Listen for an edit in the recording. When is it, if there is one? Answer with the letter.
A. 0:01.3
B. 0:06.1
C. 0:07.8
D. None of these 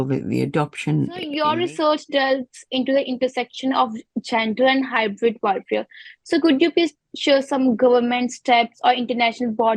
A